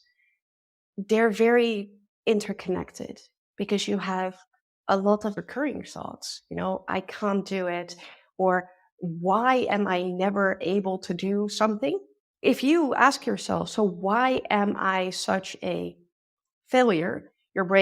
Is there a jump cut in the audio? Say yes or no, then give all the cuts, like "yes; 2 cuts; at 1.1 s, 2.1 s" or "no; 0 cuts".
yes; 2 cuts; at 5.4 s, 12.2 s